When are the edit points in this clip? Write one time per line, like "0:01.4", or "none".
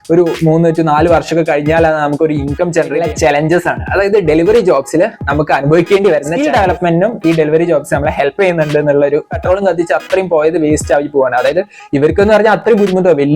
0:03.0
0:06.3
0:09.3